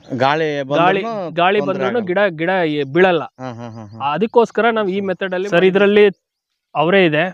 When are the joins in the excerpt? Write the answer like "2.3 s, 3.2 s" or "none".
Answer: 5.2 s